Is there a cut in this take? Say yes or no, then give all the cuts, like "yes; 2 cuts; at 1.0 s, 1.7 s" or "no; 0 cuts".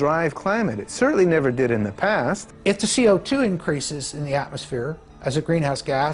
yes; 1 cut; at 2.5 s